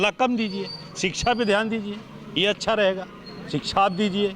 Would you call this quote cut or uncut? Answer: uncut